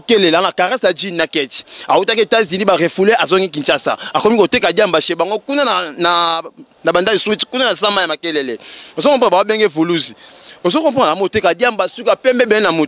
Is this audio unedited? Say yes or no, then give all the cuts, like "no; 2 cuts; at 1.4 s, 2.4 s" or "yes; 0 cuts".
yes; 0 cuts